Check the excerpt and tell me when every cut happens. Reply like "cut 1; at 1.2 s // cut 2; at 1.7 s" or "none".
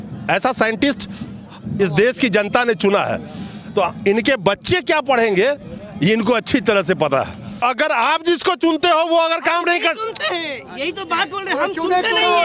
cut 1; at 7.6 s